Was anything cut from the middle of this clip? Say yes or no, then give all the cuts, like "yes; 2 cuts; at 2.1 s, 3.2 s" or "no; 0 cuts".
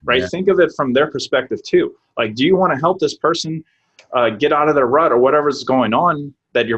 no; 0 cuts